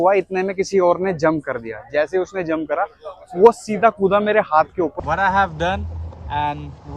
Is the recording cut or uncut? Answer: cut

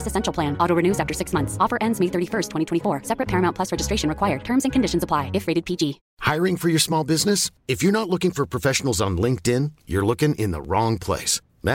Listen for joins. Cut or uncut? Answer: cut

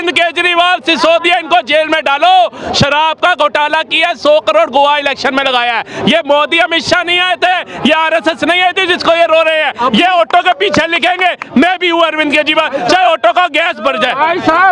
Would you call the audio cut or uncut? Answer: uncut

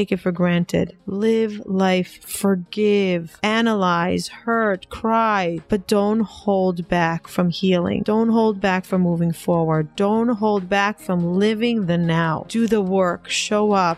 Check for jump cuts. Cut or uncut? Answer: uncut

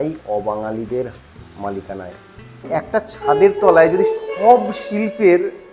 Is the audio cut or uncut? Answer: cut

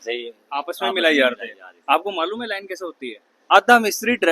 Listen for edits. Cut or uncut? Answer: cut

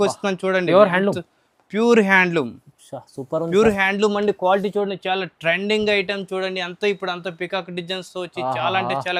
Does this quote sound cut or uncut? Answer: uncut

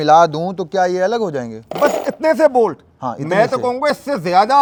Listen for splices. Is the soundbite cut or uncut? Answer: uncut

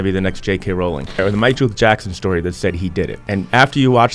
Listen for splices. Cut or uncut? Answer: cut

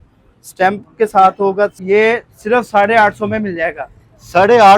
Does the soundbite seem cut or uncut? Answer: cut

